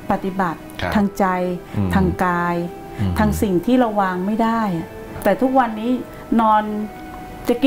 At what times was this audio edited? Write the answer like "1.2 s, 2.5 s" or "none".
5.1 s